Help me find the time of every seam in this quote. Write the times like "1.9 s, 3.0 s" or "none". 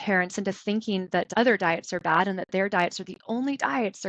1.3 s